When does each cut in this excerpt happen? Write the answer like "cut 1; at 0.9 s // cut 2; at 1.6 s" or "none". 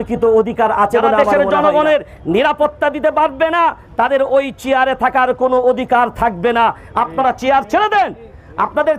cut 1; at 1.2 s